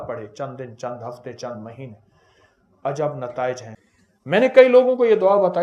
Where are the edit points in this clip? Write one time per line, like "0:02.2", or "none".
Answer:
0:03.7

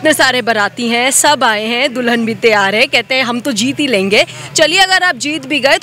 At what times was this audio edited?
none

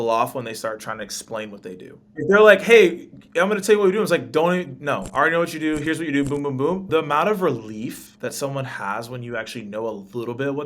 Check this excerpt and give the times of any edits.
0:02.1
0:06.9
0:08.1

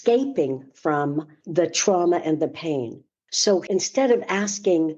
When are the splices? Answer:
0:01.4
0:03.3

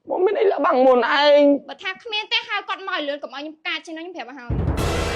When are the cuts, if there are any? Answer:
none

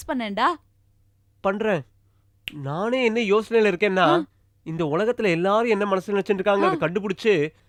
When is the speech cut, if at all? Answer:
none

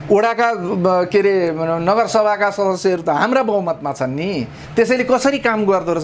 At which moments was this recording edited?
0:04.6

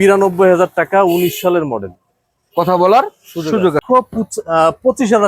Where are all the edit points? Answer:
0:03.8

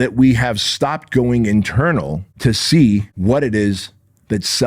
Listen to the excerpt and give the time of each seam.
0:02.2
0:03.1

